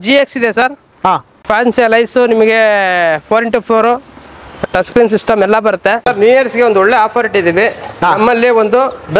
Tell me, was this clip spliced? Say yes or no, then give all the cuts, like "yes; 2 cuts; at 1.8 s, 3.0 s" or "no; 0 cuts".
yes; 2 cuts; at 1.4 s, 6.0 s